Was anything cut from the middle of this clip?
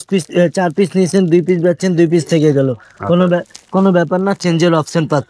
no; 0 cuts

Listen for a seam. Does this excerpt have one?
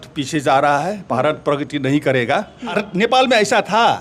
yes; 1 cut; at 2.7 s

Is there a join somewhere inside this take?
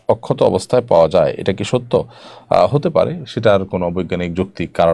no; 0 cuts

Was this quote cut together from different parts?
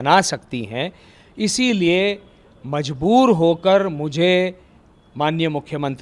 no; 0 cuts

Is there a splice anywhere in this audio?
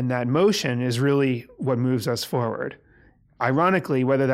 no; 0 cuts

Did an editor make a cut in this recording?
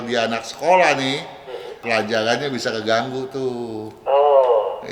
no; 0 cuts

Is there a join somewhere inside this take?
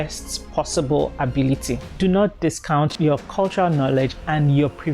yes; 2 cuts; at 1.9 s, 2.9 s

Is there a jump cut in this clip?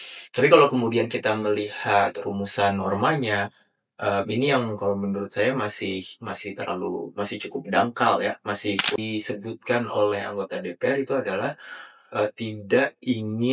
yes; 1 cut; at 9.0 s

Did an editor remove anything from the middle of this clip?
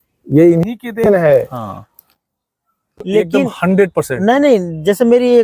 yes; 1 cut; at 3.0 s

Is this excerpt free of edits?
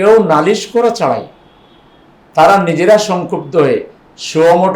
yes; 0 cuts

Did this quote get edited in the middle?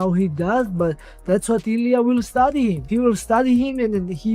yes; 1 cut; at 2.8 s

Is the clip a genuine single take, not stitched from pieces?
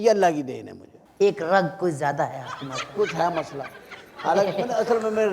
yes; 0 cuts

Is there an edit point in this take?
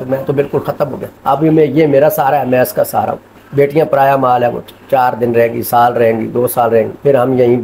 no; 0 cuts

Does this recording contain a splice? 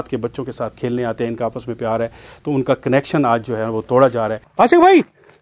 yes; 1 cut; at 4.4 s

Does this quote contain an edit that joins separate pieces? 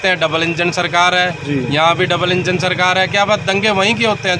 no; 0 cuts

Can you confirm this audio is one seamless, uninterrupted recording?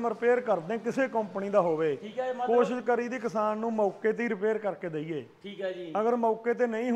yes; 0 cuts

